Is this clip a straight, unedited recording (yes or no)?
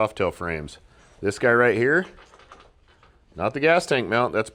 yes